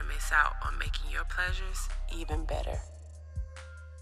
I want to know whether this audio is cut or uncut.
uncut